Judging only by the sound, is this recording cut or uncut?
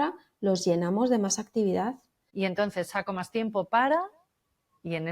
cut